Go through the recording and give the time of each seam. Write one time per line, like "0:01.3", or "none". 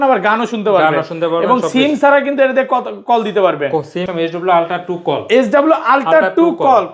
0:04.1